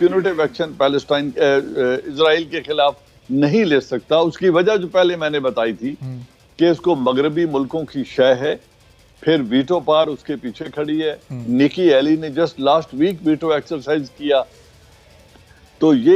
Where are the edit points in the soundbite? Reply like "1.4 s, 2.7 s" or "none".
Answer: none